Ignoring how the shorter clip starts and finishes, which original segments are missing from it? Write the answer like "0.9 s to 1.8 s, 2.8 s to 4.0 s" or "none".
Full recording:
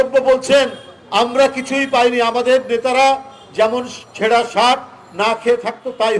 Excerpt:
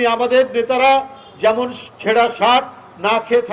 none